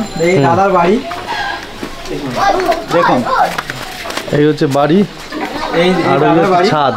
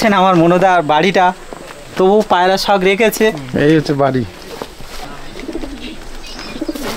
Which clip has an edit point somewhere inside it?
second; 1 cut; at 5.0 s

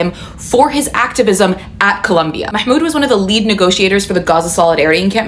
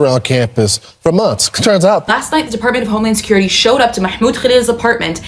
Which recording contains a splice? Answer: second; 1 cut; at 2.1 s

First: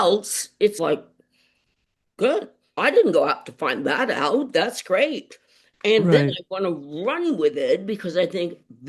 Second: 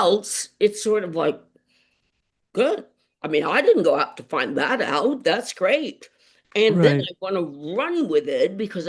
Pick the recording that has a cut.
first; 2 cuts; at 0.8 s, 2.8 s

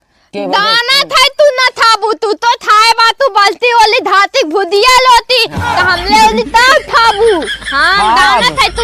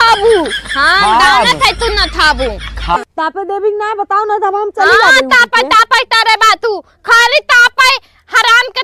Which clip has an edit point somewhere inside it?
second; 1 cut; at 3.0 s

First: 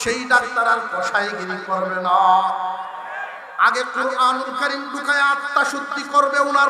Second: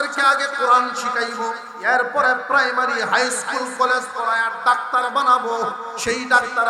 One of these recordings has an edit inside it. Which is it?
second; 1 cut; at 1.7 s

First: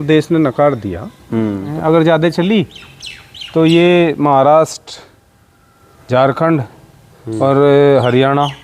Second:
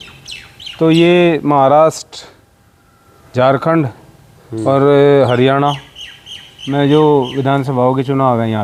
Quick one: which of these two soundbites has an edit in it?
first; 1 cut; at 1.7 s

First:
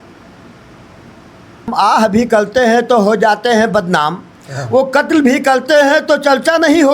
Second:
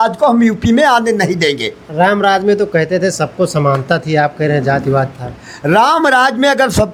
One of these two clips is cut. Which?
first; 1 cut; at 1.7 s

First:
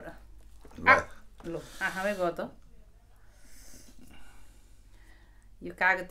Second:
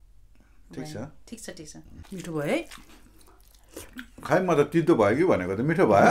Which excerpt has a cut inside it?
second; 1 cut; at 1.9 s

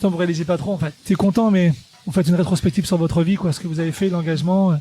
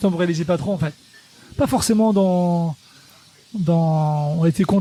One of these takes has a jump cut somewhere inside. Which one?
first; 2 cuts; at 1.1 s, 1.9 s

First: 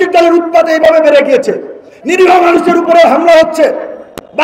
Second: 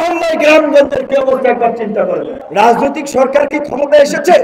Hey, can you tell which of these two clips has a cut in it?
second; 1 cut; at 2.4 s

